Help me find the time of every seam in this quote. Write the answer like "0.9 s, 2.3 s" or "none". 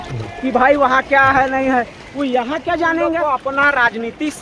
3.2 s